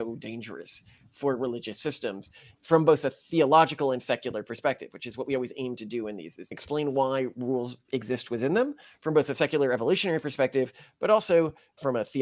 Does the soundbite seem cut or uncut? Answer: uncut